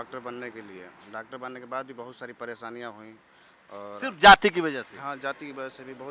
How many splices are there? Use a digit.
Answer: 0